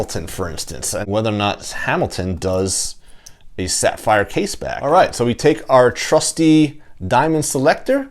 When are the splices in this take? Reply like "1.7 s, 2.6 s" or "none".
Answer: 0.9 s, 4.7 s

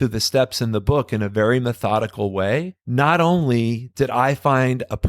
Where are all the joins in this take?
2.8 s

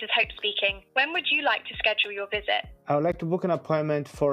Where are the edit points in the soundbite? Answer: 0.8 s, 2.7 s

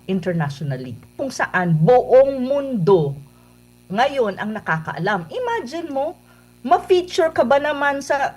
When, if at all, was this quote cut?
1.2 s

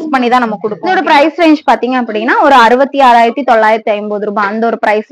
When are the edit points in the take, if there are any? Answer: 1.1 s

